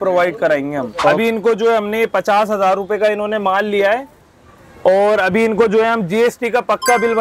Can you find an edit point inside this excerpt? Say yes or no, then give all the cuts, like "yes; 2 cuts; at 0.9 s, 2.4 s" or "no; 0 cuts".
yes; 1 cut; at 1.2 s